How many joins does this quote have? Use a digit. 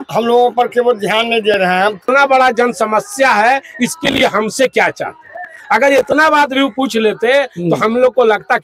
1